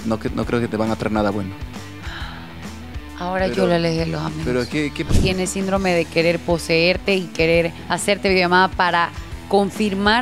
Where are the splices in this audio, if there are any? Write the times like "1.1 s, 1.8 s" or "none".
5.1 s, 7.8 s